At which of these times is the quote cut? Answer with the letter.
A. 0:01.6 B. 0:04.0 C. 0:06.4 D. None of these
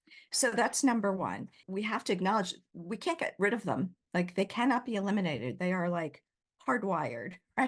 A